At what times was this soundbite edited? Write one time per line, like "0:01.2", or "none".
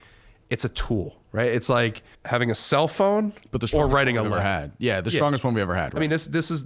0:02.1

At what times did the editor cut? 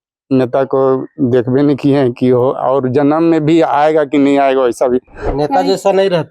0:05.2

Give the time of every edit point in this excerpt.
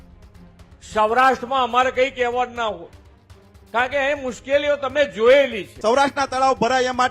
0:05.6

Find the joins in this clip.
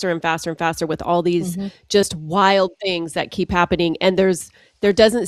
none

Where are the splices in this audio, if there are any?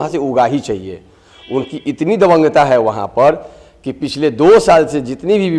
none

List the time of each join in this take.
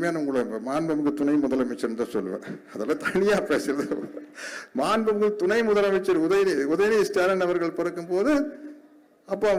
none

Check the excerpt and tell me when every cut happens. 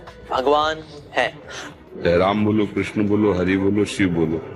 0:01.6

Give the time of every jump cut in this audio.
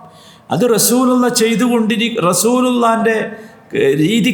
none

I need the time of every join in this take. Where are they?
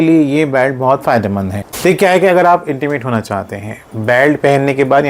0:01.6

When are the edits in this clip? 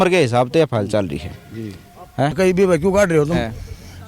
0:02.4

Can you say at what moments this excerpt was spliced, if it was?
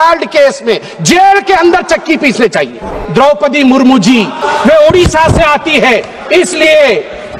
0:02.9
0:04.4

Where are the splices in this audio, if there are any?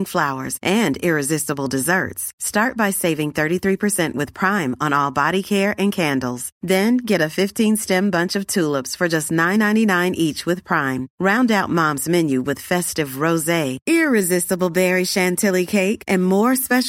none

